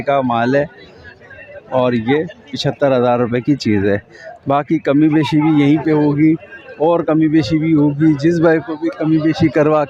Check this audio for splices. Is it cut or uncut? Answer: uncut